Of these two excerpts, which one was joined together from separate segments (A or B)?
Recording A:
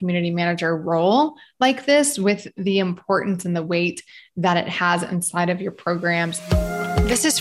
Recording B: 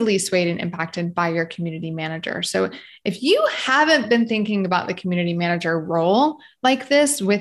A